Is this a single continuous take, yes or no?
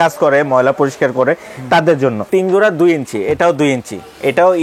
no